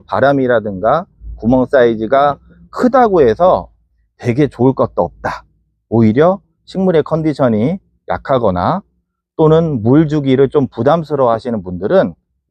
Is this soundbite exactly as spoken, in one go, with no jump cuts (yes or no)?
yes